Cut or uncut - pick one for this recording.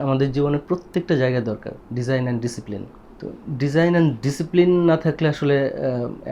uncut